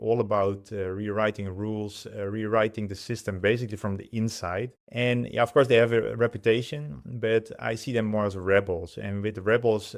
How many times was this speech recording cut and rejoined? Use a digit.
1